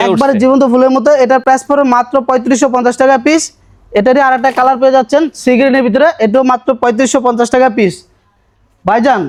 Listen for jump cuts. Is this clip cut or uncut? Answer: uncut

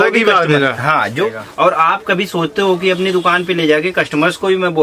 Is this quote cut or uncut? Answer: cut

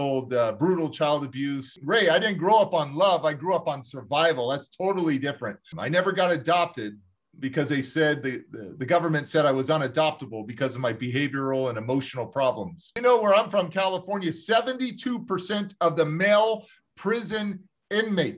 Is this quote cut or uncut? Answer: cut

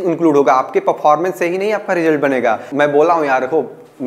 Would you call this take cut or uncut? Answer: cut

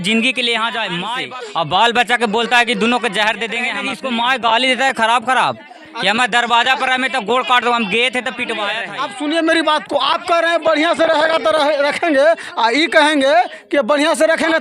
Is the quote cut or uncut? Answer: cut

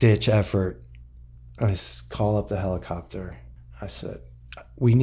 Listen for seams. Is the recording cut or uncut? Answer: uncut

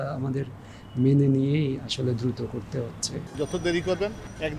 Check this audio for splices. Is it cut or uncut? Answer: cut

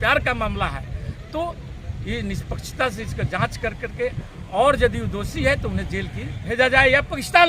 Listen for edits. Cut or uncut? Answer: cut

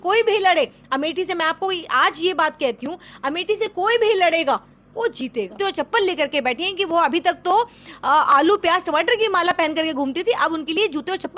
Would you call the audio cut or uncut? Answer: cut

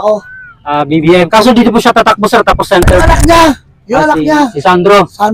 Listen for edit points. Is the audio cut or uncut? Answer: uncut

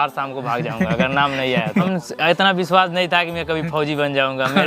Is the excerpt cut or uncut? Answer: cut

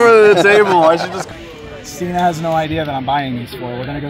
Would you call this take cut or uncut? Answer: cut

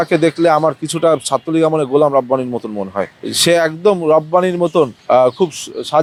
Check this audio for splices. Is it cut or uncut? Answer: uncut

